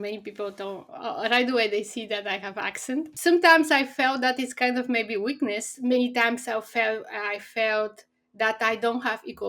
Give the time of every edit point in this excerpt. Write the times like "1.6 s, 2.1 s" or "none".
3.1 s, 5.7 s